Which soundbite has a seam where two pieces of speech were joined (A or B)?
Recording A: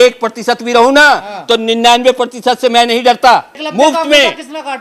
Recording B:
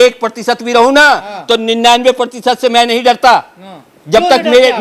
A